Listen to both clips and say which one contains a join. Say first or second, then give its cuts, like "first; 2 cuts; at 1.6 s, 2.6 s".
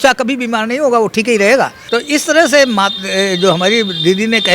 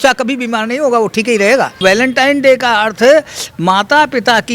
second; 1 cut; at 1.8 s